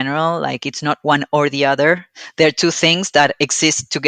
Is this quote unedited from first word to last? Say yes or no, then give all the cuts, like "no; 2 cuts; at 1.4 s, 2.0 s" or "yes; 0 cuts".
yes; 0 cuts